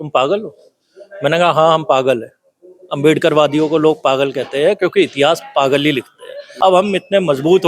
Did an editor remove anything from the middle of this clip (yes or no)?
yes